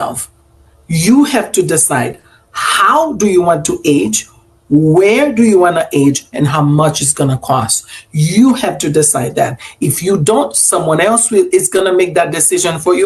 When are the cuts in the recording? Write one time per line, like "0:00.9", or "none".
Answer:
none